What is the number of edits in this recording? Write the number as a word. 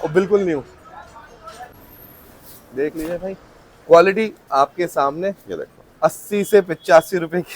one